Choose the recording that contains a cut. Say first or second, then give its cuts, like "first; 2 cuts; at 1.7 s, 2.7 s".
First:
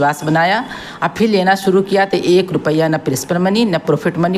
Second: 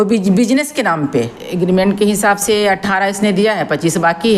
second; 1 cut; at 1.4 s